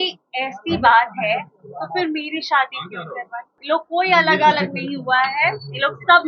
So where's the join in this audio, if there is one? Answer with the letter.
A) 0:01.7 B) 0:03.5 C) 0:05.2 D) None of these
B